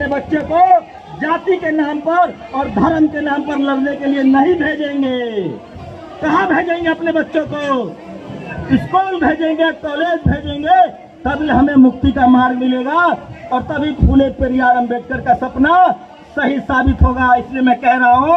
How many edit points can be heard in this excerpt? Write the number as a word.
zero